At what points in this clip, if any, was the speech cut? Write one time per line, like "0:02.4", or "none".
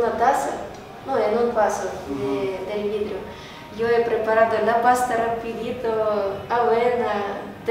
none